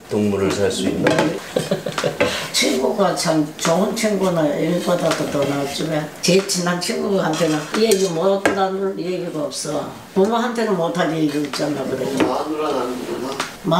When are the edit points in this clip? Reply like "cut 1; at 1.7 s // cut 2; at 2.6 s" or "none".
cut 1; at 6.2 s